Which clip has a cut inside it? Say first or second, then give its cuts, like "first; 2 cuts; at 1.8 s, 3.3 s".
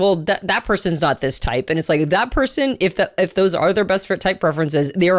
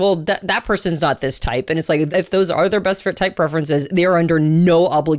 second; 1 cut; at 2.1 s